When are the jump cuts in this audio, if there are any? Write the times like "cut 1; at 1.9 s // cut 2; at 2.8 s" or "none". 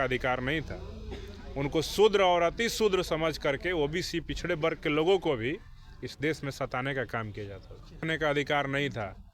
cut 1; at 8.0 s